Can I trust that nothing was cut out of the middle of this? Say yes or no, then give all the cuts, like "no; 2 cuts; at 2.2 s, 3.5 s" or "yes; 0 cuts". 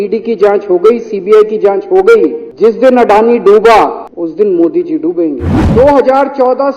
no; 3 cuts; at 2.4 s, 4.1 s, 5.5 s